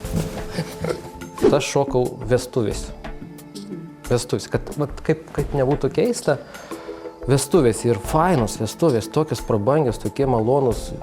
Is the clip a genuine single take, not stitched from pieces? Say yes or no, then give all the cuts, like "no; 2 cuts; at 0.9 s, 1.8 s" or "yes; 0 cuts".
no; 1 cut; at 1.3 s